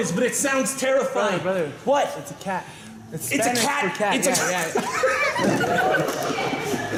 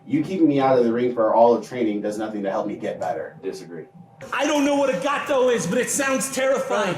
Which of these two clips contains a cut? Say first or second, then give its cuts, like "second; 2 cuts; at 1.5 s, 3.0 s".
second; 1 cut; at 4.2 s